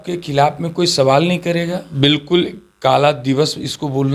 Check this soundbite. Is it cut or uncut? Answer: cut